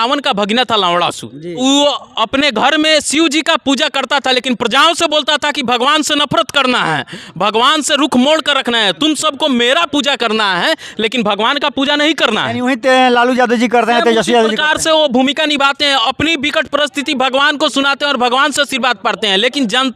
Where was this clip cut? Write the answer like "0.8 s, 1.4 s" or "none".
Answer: 1.6 s